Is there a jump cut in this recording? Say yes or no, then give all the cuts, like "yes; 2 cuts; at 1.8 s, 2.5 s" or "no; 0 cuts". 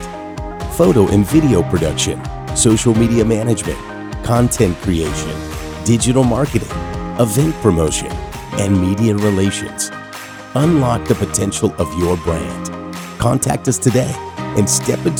no; 0 cuts